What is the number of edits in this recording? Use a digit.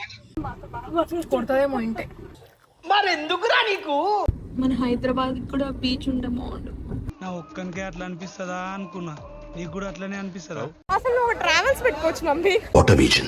2